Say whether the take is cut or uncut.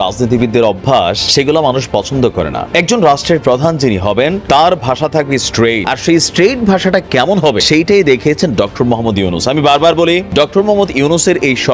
cut